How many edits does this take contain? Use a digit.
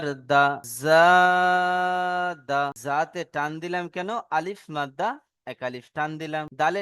1